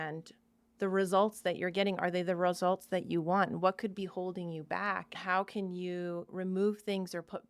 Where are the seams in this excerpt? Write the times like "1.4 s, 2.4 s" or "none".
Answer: 5.2 s, 6.3 s

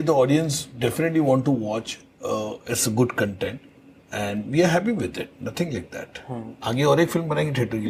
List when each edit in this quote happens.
none

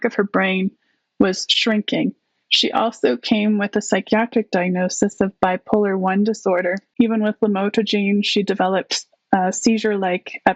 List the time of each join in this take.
6.9 s

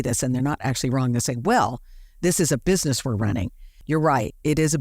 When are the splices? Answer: 3.7 s

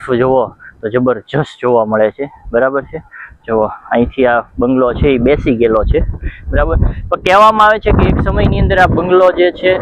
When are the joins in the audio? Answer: none

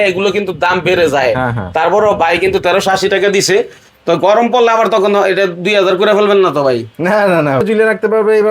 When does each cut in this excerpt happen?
7.6 s

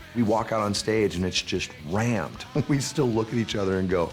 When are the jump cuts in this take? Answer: 2.5 s

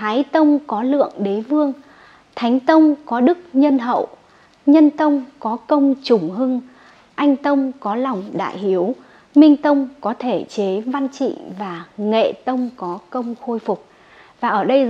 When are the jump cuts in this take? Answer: none

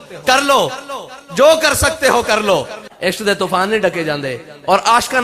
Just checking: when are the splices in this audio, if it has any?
2.8 s

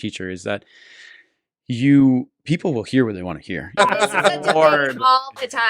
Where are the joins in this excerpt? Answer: 3.7 s

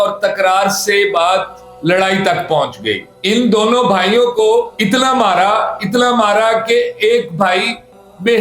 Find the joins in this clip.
3.1 s

